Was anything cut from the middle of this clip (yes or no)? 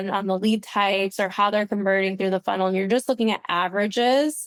no